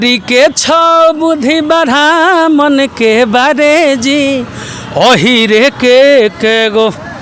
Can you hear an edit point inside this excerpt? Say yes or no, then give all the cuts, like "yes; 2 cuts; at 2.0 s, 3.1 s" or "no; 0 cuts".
no; 0 cuts